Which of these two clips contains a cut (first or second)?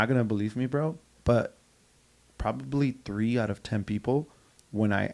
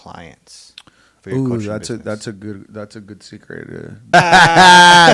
second